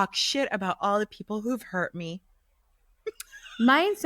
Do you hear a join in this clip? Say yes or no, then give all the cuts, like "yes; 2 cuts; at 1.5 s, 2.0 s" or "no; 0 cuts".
no; 0 cuts